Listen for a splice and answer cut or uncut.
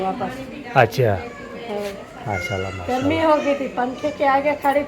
uncut